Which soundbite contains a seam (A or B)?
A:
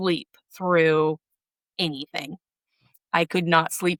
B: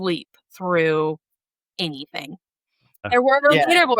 B